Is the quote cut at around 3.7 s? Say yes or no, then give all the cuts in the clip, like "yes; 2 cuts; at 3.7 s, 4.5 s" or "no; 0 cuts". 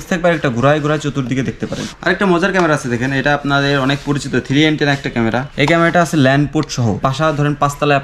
no; 3 cuts; at 1.9 s, 5.5 s, 7.0 s